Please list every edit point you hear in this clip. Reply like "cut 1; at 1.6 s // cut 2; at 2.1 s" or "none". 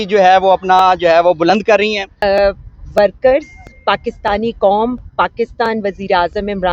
cut 1; at 2.2 s